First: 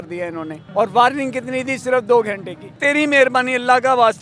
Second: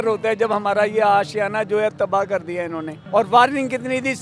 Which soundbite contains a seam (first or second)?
first